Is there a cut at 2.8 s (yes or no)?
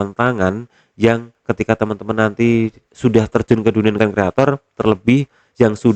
yes